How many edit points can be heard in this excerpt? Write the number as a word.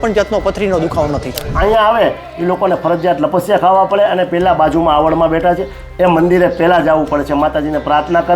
one